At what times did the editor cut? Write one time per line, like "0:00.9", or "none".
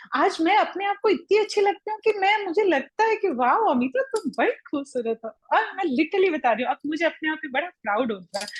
none